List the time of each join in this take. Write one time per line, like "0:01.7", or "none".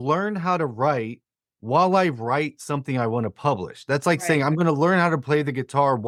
none